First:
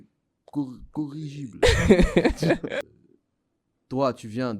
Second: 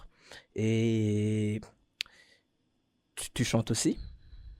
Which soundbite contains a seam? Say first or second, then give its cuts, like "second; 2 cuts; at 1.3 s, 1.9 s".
first; 1 cut; at 2.8 s